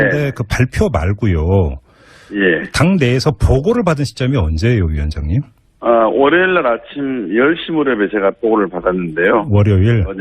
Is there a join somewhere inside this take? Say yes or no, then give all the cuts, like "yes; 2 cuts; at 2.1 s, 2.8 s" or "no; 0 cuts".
yes; 1 cut; at 5.3 s